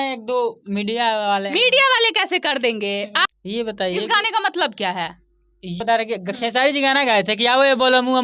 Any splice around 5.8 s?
yes; 2 cuts; at 3.3 s, 5.8 s

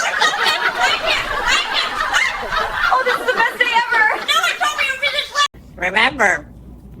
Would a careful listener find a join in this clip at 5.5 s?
yes; 1 cut; at 5.5 s

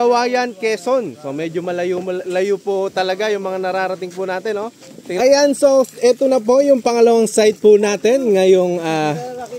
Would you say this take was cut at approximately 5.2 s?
yes; 1 cut; at 5.2 s

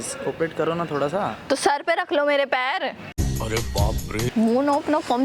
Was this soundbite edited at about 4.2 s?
yes; 1 cut; at 4.2 s

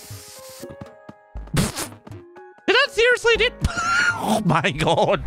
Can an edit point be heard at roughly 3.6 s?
no; 0 cuts

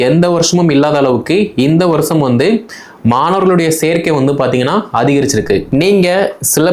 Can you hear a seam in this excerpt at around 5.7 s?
yes; 1 cut; at 5.7 s

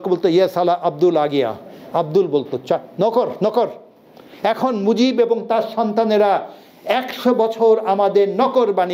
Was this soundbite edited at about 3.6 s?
no; 0 cuts

